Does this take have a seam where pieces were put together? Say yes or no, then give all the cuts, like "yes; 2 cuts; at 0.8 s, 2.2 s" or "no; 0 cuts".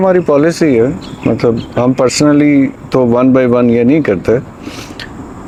no; 0 cuts